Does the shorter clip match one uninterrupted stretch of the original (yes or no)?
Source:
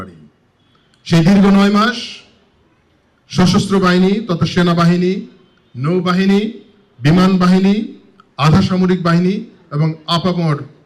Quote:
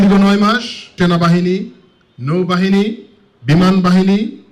no